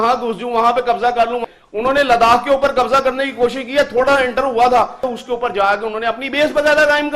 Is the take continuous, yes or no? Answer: yes